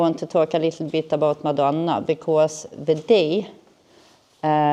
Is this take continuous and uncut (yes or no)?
yes